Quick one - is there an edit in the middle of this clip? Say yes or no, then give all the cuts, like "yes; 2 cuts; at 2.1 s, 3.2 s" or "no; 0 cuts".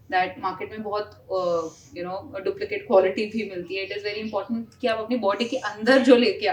no; 0 cuts